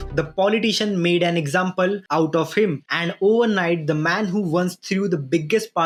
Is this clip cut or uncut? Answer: uncut